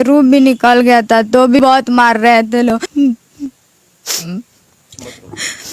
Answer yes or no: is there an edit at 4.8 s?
no